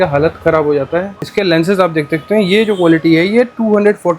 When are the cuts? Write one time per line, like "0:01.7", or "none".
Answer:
0:01.2